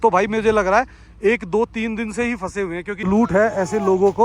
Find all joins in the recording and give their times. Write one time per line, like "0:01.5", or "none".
0:02.9